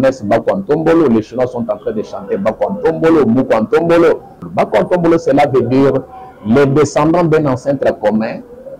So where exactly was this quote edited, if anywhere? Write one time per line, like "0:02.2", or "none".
0:04.4